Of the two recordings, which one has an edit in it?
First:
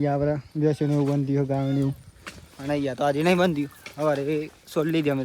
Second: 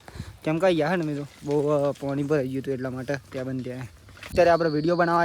second; 1 cut; at 4.3 s

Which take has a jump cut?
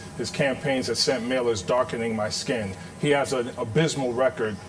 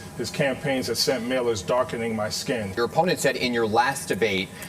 second; 1 cut; at 2.7 s

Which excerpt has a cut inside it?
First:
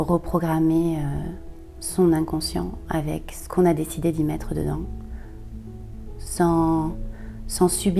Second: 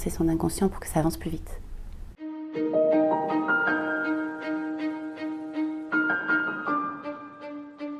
second; 1 cut; at 2.4 s

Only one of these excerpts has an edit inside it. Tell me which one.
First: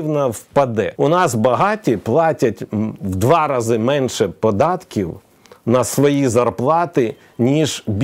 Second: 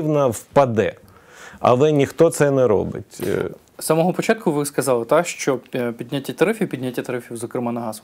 first; 1 cut; at 0.9 s

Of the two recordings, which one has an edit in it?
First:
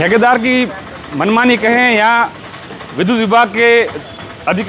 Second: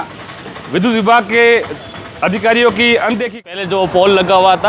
second; 1 cut; at 3.4 s

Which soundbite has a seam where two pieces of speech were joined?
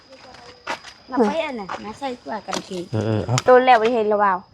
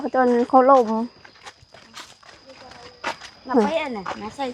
first; 1 cut; at 3.5 s

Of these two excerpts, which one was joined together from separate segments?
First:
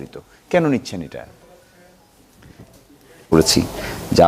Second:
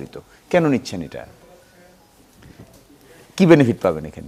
first; 1 cut; at 3.2 s

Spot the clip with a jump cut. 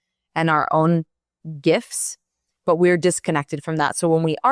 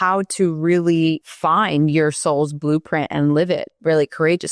second; 2 cuts; at 1.3 s, 3.7 s

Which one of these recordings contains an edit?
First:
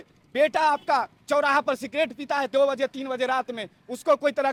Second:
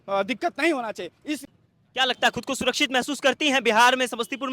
second; 1 cut; at 1.4 s

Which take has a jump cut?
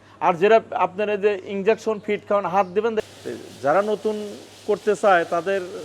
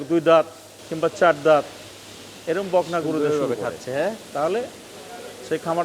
first; 1 cut; at 3.0 s

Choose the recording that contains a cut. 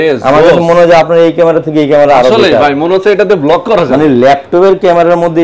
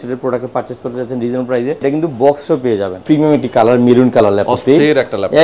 second; 2 cuts; at 1.8 s, 3.0 s

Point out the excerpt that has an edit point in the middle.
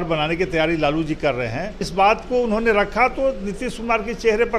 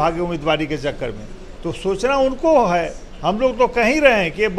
first; 1 cut; at 1.9 s

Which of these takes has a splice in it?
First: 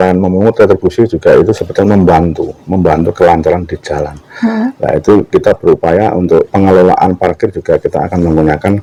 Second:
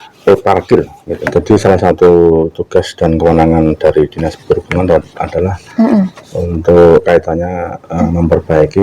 second; 1 cut; at 1.2 s

